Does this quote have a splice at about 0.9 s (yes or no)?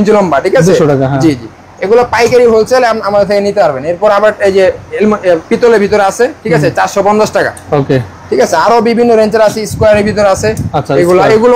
no